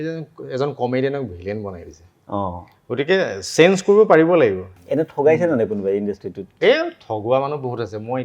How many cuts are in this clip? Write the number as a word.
one